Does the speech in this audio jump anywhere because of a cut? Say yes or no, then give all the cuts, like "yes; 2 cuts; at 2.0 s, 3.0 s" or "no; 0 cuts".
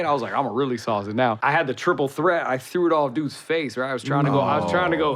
yes; 1 cut; at 1.4 s